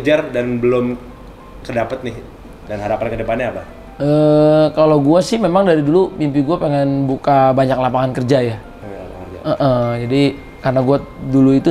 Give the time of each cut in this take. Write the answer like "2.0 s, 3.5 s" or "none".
none